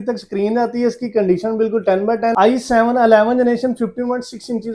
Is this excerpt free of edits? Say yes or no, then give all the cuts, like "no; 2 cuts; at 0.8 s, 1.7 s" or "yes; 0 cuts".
no; 1 cut; at 2.3 s